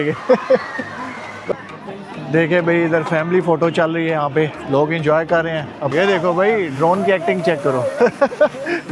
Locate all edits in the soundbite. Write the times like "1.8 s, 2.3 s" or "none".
1.5 s, 5.9 s

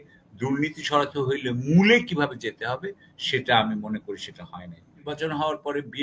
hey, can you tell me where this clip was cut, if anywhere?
5.1 s

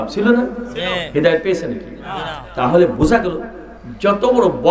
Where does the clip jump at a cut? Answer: none

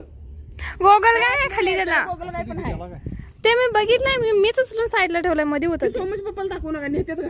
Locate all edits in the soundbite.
none

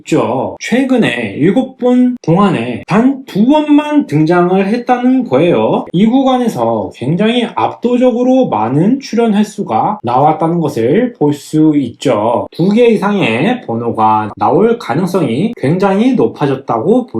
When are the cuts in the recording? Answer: 5.9 s, 12.5 s

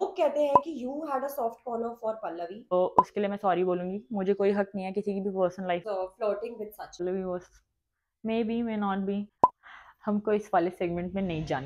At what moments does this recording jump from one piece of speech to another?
2.7 s, 5.8 s, 7.0 s, 9.3 s

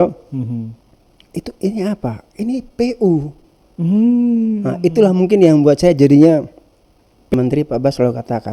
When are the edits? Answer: 7.3 s

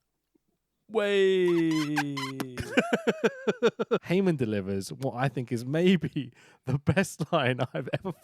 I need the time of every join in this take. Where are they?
4.0 s

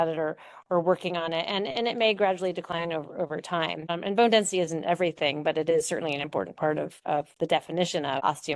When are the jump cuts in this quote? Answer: none

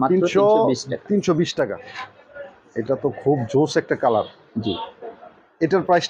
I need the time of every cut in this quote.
1.8 s

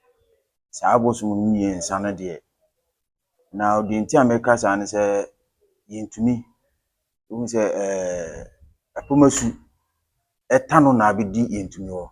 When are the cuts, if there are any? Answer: none

